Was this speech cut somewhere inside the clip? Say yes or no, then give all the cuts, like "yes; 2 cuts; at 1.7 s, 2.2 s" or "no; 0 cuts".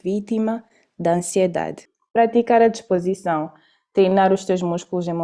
yes; 1 cut; at 1.8 s